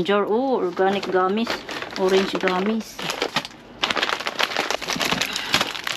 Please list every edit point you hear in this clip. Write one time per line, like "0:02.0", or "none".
0:03.3
0:04.8